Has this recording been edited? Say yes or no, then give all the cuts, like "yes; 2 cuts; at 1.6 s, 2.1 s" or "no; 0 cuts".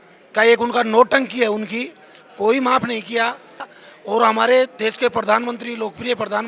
yes; 1 cut; at 3.7 s